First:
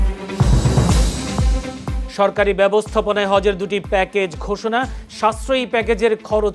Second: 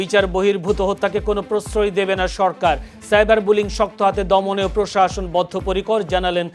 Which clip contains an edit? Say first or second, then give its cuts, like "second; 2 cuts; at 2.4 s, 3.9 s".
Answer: first; 1 cut; at 2.0 s